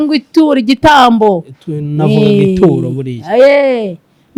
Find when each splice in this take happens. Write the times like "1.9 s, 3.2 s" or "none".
none